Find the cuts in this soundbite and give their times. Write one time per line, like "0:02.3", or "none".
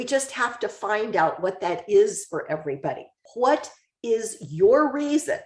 0:03.2